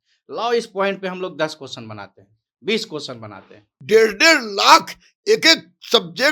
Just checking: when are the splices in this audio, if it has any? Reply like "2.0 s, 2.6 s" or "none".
3.7 s

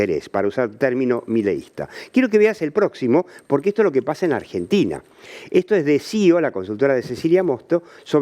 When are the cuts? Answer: none

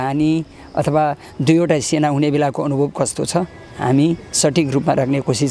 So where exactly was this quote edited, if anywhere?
none

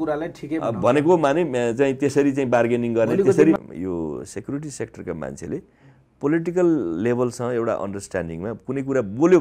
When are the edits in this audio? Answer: 3.6 s

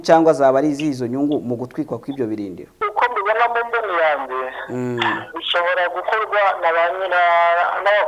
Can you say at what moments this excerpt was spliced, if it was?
2.8 s

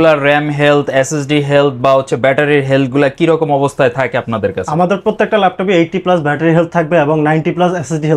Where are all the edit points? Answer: none

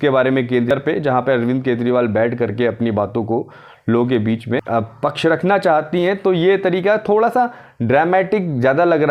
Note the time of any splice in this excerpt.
0.7 s, 4.6 s

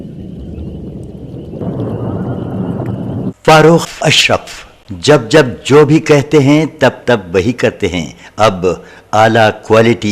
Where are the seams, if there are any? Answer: 3.3 s

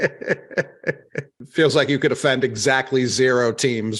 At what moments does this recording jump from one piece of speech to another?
1.3 s

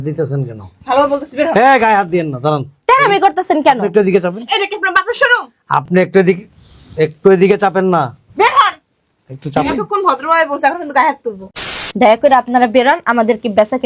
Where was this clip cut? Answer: 11.8 s

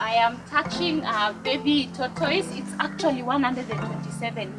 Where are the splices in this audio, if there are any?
none

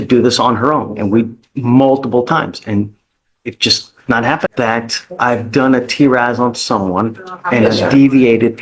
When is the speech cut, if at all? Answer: 4.5 s

